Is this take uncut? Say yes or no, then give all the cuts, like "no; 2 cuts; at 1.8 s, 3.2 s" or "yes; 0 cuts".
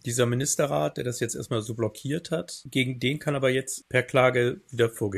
yes; 0 cuts